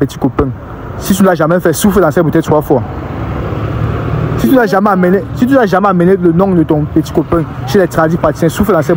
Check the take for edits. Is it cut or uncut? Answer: uncut